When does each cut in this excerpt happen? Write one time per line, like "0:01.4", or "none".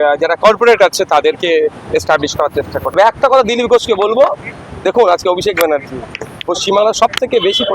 0:02.9